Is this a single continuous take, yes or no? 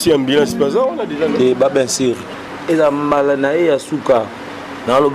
no